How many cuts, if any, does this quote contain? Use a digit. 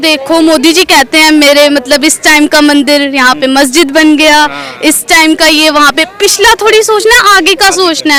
0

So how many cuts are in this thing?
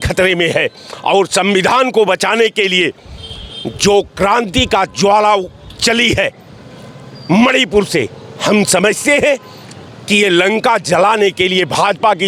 0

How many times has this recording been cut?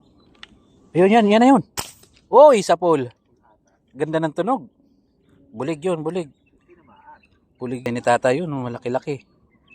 3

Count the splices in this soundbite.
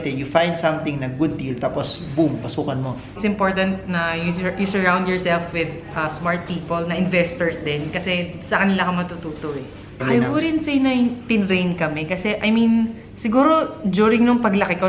2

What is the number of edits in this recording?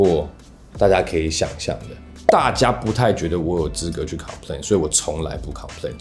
1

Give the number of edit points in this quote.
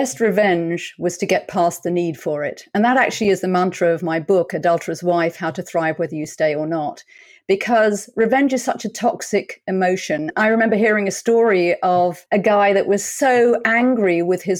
2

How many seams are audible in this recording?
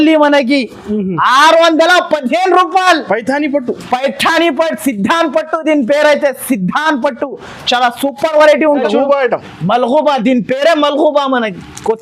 1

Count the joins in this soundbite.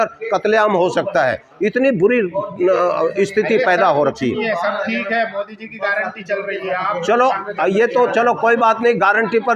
0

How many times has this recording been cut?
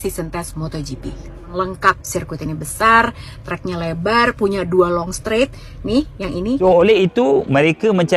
2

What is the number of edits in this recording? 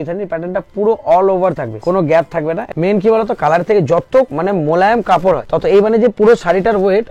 4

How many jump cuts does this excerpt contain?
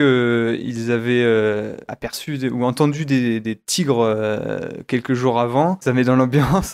1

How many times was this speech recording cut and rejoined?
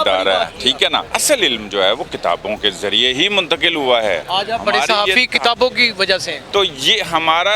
3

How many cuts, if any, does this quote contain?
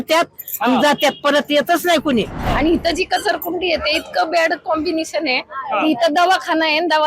1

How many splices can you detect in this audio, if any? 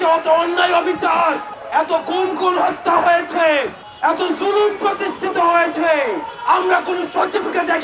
3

